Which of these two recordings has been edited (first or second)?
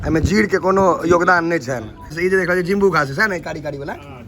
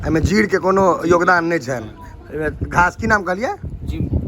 first